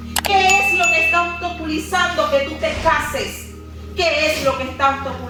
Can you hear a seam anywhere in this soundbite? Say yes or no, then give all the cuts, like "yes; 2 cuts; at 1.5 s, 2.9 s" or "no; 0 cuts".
no; 0 cuts